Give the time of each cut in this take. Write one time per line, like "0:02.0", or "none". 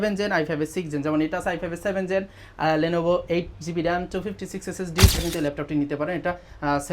0:05.2